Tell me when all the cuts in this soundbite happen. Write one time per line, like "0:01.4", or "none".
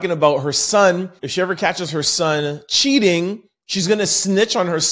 0:01.2